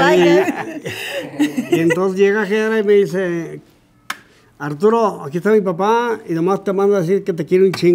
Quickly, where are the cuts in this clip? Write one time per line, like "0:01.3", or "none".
none